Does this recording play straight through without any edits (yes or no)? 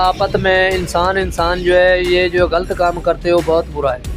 yes